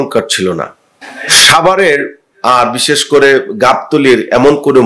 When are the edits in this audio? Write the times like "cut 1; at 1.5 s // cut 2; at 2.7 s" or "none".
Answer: none